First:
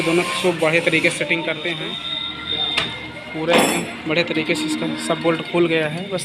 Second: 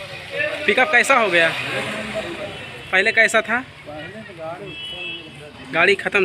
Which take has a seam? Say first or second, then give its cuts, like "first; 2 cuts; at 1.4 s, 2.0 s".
first; 1 cut; at 1.9 s